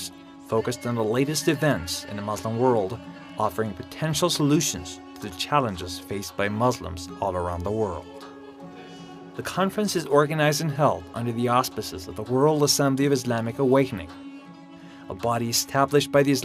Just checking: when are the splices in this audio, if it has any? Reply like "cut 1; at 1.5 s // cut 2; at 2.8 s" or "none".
cut 1; at 4.6 s